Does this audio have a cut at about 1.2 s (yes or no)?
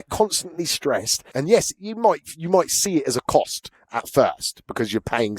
yes